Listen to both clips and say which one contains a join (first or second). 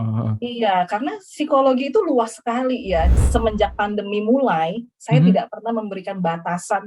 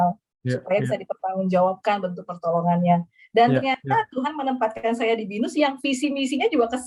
first